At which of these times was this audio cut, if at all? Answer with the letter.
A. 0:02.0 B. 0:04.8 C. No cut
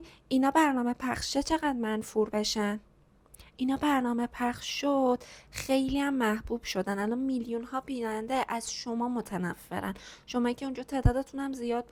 C